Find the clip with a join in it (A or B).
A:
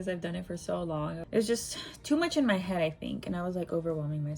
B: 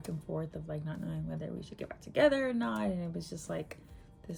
A